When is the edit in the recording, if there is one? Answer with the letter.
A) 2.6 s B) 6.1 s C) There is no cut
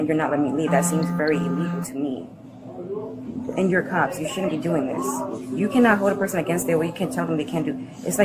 C